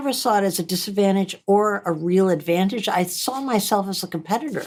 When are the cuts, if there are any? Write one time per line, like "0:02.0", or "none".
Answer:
none